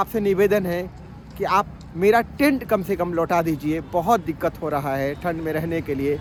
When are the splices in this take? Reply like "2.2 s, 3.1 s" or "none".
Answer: none